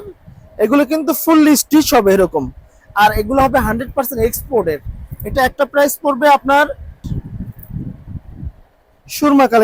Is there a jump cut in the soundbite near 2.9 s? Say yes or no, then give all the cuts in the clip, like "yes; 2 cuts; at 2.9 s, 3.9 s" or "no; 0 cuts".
no; 1 cut; at 7.1 s